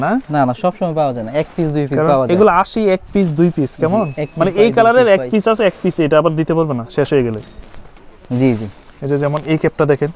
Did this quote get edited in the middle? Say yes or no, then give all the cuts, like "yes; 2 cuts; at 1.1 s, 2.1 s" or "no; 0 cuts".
no; 0 cuts